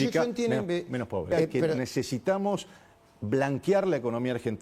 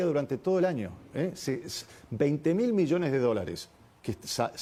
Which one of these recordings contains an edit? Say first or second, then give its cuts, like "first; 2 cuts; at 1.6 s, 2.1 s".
first; 1 cut; at 1.8 s